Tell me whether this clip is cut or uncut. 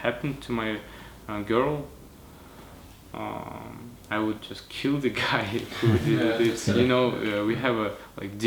uncut